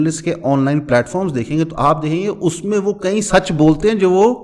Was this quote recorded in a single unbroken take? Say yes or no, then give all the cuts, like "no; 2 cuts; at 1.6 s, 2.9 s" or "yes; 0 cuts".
yes; 0 cuts